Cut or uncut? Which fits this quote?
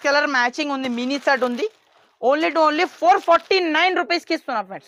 uncut